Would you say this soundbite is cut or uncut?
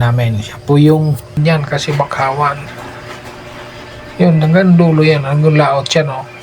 cut